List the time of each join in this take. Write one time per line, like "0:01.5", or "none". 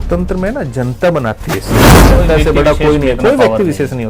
0:01.9